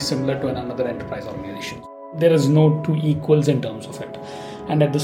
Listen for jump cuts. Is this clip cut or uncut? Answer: cut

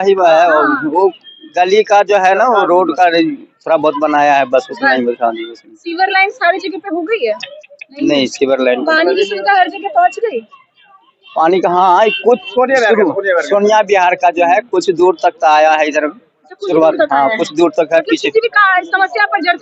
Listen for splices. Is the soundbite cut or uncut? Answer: uncut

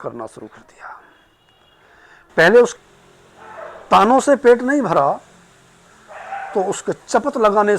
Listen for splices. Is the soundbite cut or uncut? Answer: cut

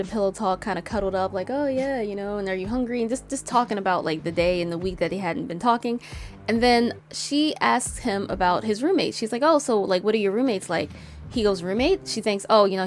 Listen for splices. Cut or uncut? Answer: uncut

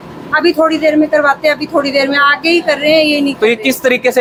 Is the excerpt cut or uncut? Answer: uncut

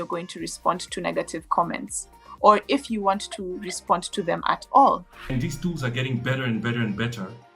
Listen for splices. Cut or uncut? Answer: cut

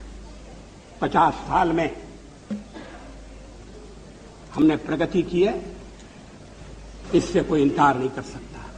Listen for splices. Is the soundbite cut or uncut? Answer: uncut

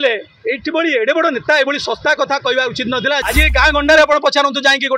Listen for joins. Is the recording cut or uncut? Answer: cut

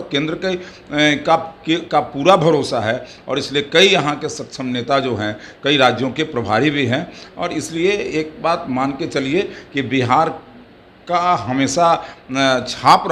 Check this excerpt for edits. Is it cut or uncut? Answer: uncut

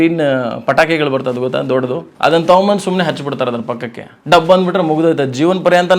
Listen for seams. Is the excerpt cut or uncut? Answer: cut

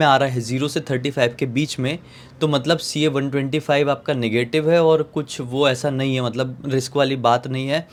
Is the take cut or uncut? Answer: uncut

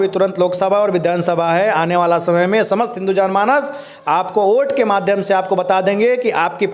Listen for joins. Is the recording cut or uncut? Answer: uncut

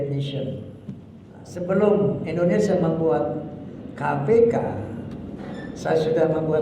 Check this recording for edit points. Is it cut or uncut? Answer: cut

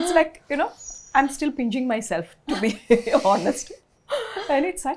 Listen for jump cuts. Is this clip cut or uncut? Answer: uncut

